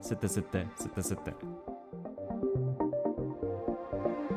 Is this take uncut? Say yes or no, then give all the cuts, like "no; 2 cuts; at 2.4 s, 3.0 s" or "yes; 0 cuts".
no; 1 cut; at 1.2 s